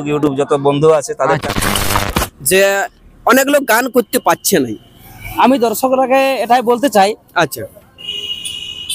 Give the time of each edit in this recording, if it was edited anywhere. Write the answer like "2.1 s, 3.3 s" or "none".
2.0 s